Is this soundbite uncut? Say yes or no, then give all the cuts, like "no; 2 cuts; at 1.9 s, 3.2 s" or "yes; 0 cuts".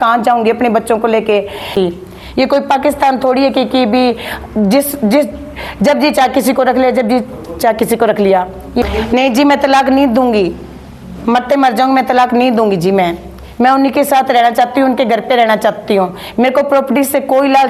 no; 2 cuts; at 1.7 s, 8.8 s